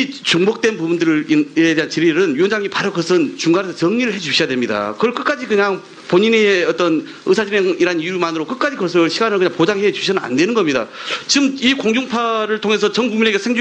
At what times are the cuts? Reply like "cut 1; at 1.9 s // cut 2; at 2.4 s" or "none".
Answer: cut 1; at 2.6 s